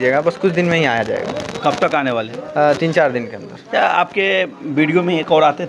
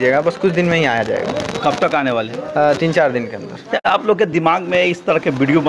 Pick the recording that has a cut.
second; 1 cut; at 3.8 s

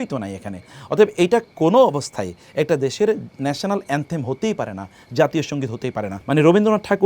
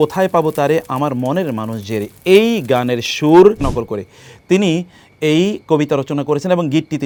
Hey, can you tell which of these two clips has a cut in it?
first; 1 cut; at 6.1 s

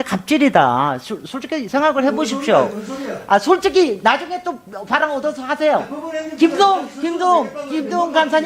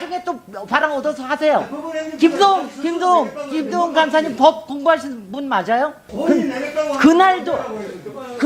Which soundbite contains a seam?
second; 1 cut; at 6.1 s

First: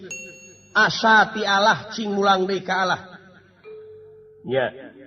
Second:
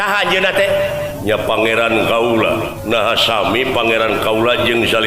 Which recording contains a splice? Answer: second; 2 cuts; at 1.1 s, 2.8 s

